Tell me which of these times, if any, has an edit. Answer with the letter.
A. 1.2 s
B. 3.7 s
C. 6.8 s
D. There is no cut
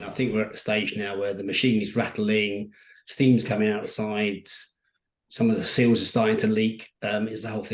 D